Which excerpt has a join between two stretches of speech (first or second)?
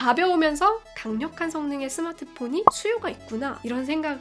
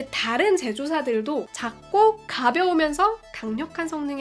second